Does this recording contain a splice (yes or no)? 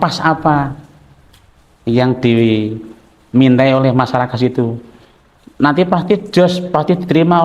no